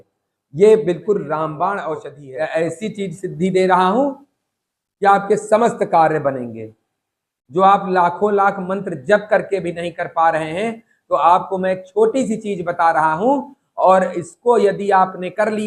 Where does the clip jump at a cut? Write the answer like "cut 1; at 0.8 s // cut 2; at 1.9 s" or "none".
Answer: cut 1; at 2.1 s